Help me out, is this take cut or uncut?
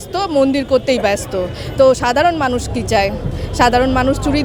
uncut